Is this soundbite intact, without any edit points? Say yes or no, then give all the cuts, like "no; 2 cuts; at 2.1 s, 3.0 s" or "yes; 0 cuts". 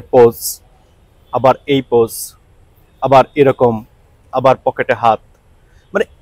yes; 0 cuts